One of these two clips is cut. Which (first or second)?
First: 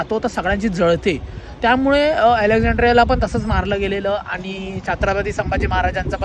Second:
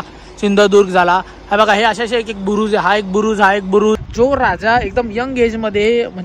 second